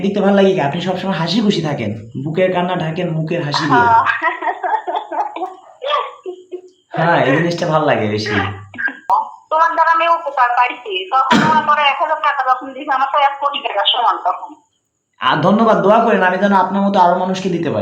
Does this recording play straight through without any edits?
no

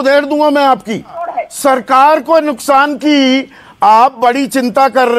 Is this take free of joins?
no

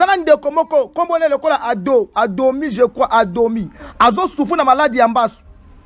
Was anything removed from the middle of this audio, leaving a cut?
no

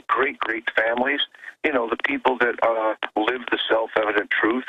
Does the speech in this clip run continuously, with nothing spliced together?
no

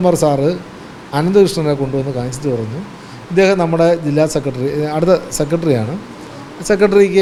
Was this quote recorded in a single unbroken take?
yes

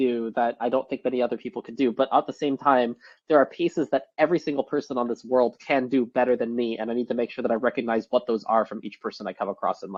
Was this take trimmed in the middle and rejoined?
no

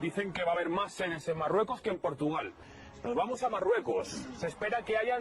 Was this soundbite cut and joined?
yes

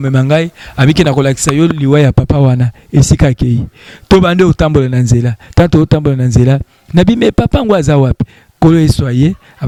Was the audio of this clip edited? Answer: no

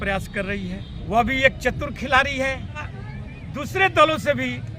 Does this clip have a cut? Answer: yes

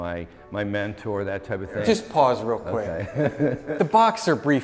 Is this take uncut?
no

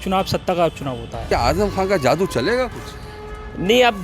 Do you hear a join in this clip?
yes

